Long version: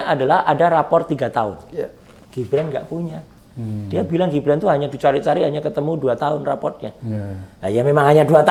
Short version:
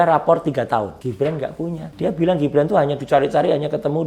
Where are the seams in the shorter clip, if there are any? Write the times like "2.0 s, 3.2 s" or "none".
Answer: 1.0 s, 1.9 s